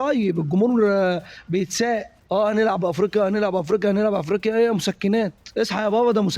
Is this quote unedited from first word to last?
no; 2 cuts; at 2.1 s, 5.4 s

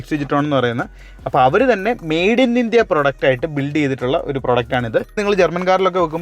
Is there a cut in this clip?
yes; 1 cut; at 5.2 s

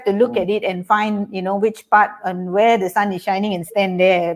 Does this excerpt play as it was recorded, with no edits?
yes; 0 cuts

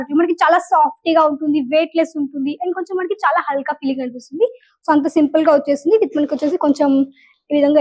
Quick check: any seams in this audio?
no; 0 cuts

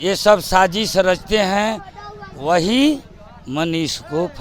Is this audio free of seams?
yes; 0 cuts

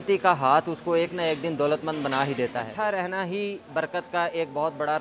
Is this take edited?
yes; 1 cut; at 2.7 s

